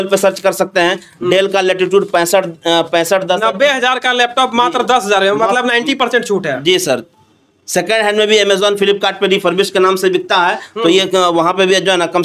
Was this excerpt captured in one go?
yes; 0 cuts

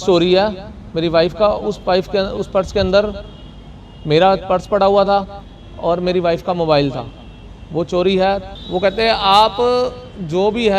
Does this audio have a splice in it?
yes; 1 cut; at 8.5 s

